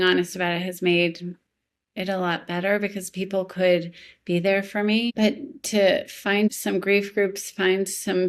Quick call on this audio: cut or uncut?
cut